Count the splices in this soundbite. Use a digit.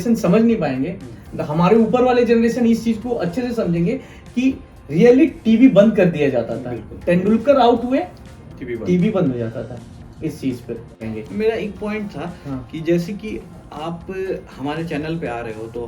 1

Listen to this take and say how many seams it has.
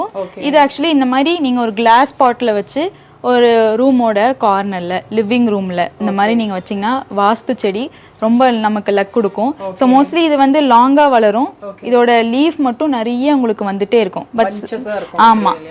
0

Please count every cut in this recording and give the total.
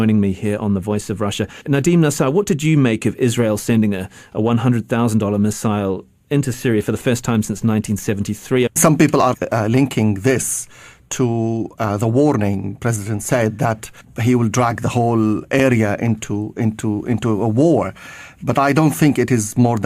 1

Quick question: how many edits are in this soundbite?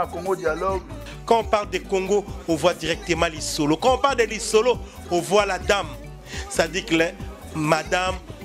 0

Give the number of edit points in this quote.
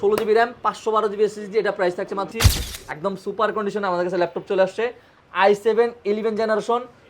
1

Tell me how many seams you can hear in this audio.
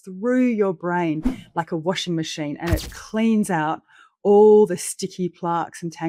0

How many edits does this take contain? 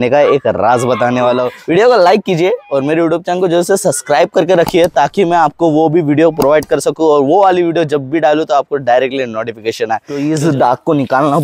2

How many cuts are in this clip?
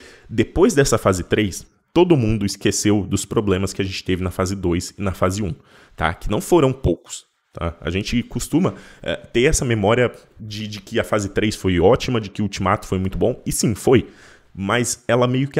0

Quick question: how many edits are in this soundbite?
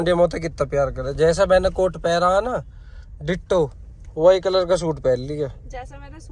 0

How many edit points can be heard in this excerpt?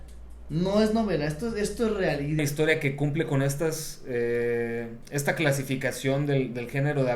1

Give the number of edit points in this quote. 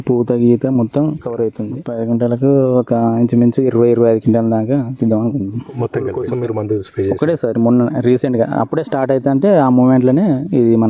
2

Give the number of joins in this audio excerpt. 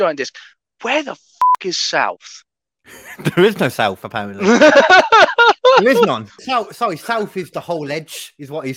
1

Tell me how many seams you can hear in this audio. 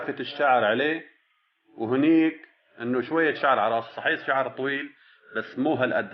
0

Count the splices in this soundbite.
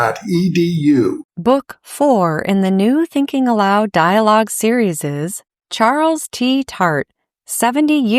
1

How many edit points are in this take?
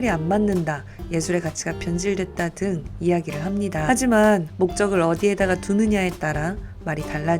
1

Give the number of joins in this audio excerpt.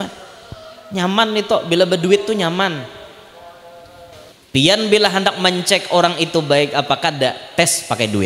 1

